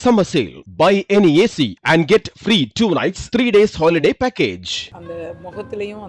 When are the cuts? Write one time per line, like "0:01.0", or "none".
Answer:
0:04.9

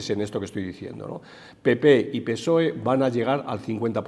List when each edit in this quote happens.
none

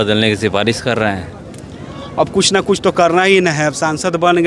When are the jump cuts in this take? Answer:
none

